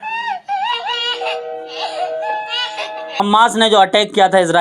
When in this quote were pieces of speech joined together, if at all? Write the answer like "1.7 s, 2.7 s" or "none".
3.2 s